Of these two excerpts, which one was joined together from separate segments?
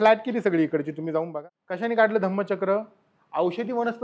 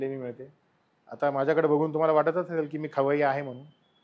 first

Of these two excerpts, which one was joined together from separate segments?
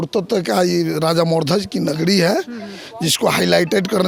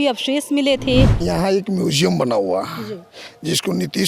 second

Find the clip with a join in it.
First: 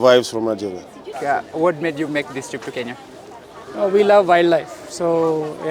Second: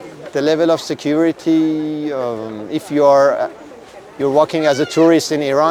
first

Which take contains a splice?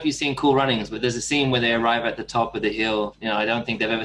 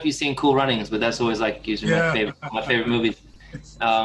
first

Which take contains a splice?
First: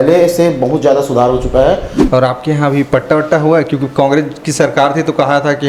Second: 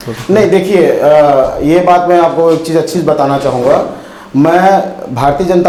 first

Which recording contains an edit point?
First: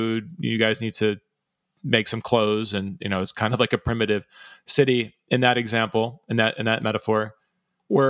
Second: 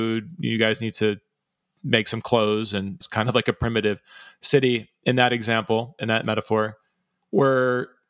second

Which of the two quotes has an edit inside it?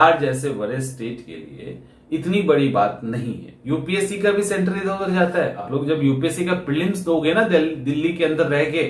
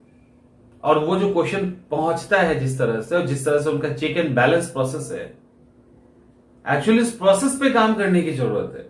first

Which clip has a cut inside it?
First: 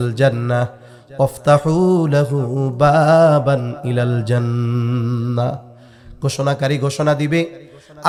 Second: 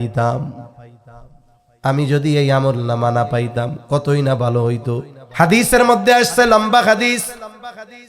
second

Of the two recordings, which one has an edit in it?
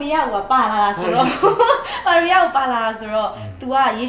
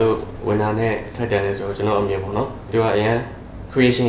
second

